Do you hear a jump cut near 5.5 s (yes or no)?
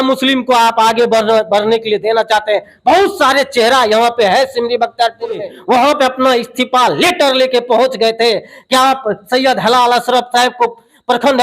yes